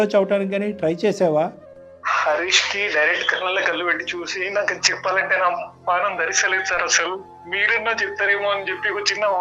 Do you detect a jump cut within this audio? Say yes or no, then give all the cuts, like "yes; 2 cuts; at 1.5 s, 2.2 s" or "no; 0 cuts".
no; 0 cuts